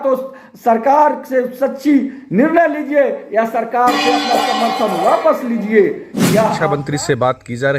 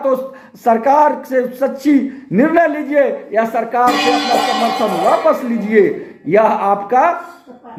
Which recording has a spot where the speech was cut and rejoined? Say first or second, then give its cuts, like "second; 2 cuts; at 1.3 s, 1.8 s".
first; 1 cut; at 6.6 s